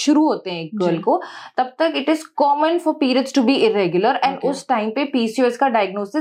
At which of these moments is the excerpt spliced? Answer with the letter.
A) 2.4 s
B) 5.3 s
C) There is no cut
C